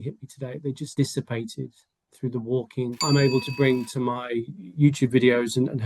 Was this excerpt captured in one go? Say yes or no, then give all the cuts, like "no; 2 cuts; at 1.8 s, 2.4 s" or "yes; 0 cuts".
no; 2 cuts; at 0.9 s, 3.0 s